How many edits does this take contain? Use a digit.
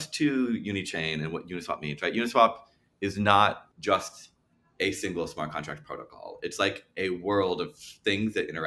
1